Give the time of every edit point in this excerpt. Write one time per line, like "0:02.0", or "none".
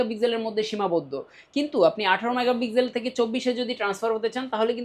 none